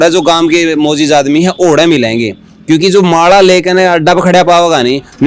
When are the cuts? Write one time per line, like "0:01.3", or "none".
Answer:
none